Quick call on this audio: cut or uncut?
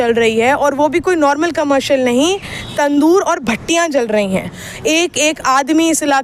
cut